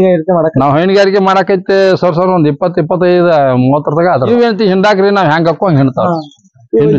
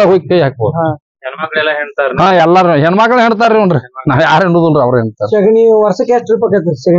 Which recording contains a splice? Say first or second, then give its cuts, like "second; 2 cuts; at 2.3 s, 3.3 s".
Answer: first; 1 cut; at 4.3 s